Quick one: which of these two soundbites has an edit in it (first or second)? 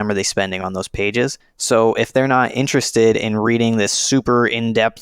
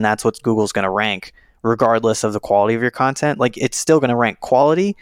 first